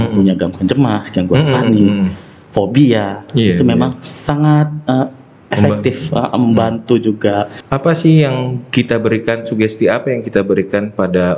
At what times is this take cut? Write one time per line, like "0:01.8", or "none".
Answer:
0:07.6